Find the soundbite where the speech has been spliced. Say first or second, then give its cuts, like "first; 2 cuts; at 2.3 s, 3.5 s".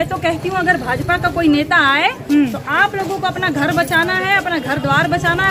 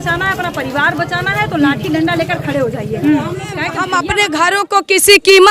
second; 1 cut; at 3.8 s